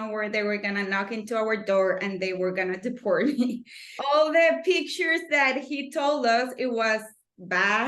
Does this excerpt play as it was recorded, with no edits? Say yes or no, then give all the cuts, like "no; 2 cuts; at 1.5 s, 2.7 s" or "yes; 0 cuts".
no; 1 cut; at 3.9 s